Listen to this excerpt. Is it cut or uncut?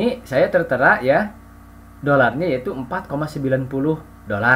uncut